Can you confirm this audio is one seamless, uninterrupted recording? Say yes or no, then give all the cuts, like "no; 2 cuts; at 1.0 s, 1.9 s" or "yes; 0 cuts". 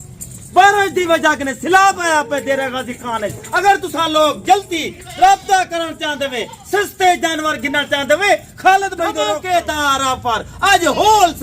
no; 1 cut; at 9.2 s